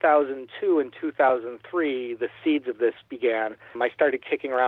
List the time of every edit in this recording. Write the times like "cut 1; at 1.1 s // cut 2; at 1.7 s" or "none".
cut 1; at 3.7 s